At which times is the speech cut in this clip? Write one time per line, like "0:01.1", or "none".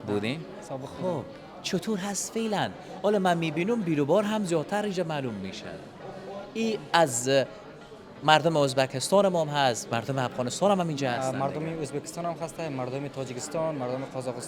none